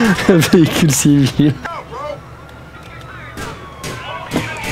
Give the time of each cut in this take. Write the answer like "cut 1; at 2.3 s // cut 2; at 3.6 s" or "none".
cut 1; at 1.6 s